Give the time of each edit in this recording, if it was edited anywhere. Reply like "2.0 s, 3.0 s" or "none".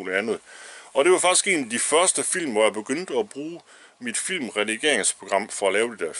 none